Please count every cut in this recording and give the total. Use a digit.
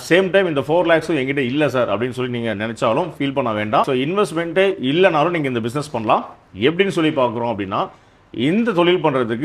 0